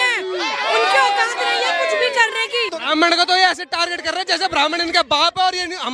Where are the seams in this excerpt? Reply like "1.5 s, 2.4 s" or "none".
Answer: 2.8 s